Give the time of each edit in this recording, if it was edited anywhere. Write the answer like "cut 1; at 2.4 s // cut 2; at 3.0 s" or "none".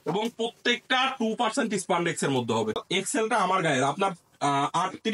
cut 1; at 2.8 s